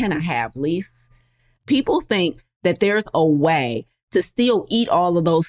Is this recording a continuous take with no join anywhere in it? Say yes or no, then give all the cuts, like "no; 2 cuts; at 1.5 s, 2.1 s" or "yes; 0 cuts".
no; 1 cut; at 1.6 s